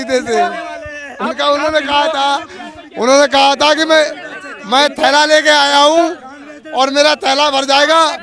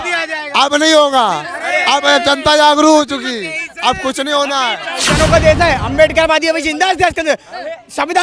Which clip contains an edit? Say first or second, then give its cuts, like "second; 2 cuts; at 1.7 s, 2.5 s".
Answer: second; 1 cut; at 5.1 s